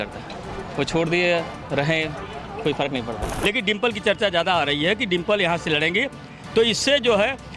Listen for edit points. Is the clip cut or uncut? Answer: cut